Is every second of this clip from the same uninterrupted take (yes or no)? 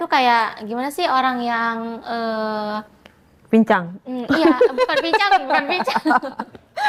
yes